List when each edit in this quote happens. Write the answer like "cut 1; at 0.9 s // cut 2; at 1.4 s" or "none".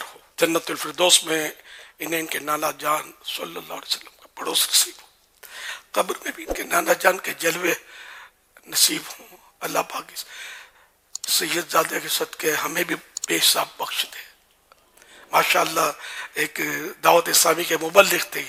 none